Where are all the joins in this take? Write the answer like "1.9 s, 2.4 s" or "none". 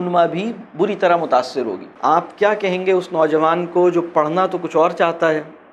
1.8 s